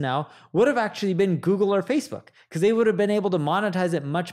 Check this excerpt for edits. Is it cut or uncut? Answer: uncut